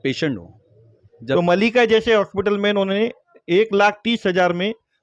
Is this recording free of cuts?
no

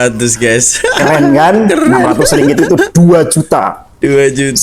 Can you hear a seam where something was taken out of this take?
no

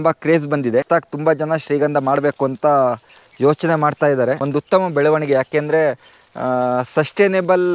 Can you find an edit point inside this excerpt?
yes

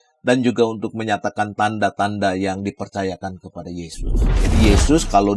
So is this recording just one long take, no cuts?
no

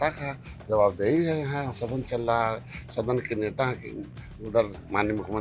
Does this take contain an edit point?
no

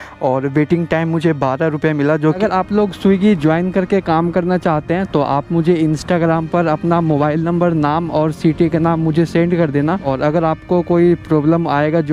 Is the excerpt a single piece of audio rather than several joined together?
no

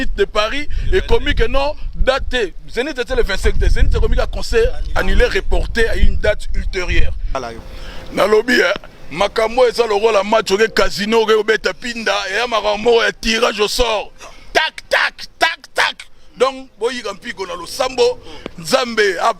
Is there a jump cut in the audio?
yes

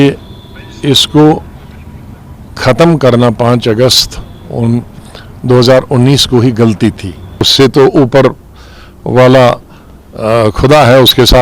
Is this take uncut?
no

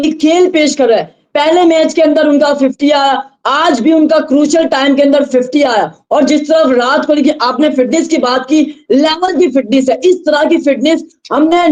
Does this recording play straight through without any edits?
yes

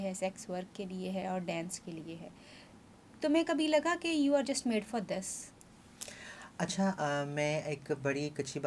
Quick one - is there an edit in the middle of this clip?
no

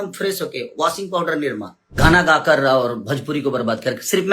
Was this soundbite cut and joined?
yes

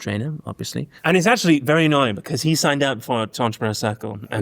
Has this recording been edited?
yes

